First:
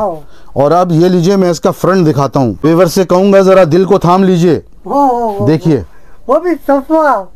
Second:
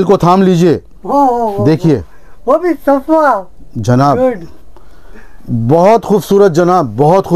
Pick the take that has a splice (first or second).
first